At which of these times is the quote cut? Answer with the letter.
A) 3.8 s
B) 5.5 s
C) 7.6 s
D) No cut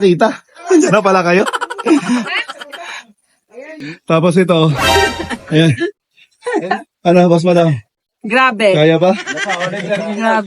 A